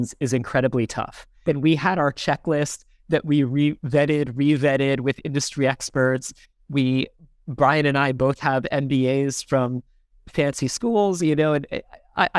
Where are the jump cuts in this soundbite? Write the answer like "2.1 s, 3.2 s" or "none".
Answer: 1.2 s